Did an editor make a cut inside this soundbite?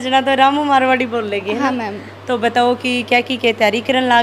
no; 0 cuts

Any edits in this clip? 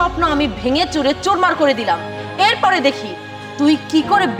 no; 0 cuts

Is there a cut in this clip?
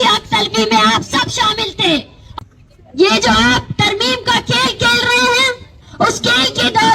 yes; 1 cut; at 2.2 s

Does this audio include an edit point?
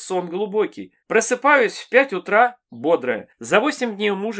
yes; 1 cut; at 3.3 s

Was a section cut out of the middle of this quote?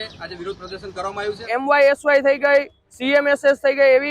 yes; 1 cut; at 1.5 s

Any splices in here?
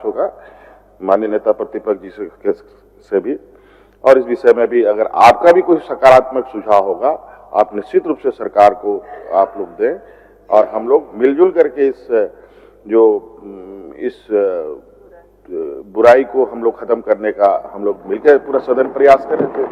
no; 0 cuts

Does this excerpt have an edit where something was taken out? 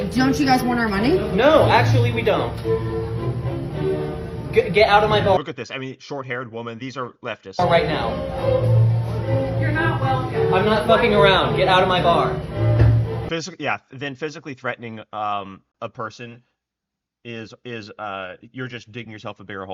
no; 0 cuts

